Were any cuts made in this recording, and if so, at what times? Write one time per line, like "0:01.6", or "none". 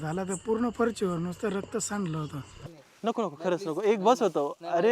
0:02.6